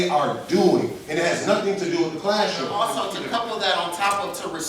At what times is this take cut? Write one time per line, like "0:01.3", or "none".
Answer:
0:02.7